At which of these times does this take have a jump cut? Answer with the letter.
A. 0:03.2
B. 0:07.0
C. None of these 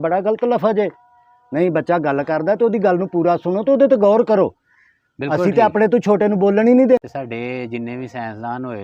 B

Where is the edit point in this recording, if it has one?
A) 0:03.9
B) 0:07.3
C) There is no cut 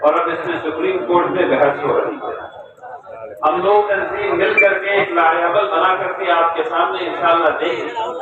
A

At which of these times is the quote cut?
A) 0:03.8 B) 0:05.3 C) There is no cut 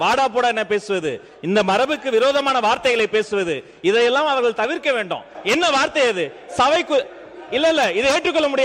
B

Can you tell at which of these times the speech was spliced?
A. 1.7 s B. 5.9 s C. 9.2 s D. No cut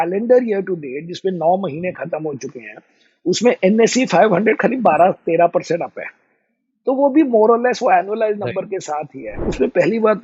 C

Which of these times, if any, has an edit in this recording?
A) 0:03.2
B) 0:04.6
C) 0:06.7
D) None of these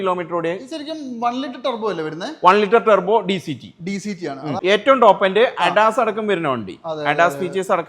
B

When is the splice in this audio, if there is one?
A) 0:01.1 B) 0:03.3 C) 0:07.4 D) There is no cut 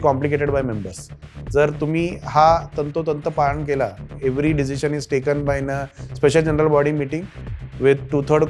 A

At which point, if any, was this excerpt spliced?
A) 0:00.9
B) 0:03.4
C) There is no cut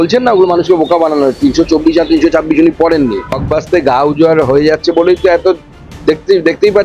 B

